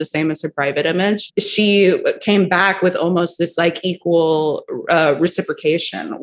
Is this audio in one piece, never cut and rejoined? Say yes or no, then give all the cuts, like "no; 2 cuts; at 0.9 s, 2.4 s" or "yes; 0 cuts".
no; 1 cut; at 1.2 s